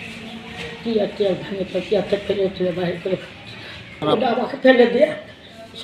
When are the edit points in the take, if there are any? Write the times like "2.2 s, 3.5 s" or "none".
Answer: 3.9 s